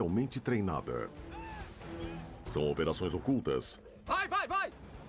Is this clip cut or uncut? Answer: uncut